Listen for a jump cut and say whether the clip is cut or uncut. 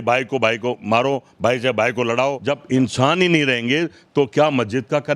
cut